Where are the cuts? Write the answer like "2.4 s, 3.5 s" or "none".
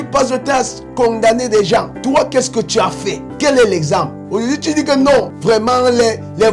1.9 s, 3.3 s, 5.3 s